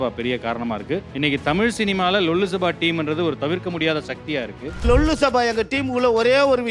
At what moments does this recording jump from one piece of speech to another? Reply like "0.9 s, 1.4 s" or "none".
1.1 s, 4.8 s